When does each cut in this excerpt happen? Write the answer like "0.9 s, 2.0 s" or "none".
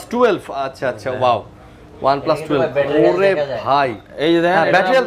none